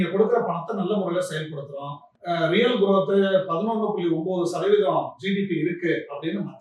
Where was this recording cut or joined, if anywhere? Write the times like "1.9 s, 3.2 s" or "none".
2.1 s